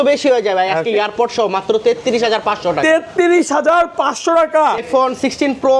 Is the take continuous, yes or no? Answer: no